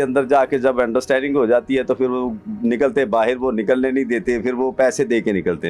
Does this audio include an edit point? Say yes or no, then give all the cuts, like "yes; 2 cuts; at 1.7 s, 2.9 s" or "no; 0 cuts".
no; 0 cuts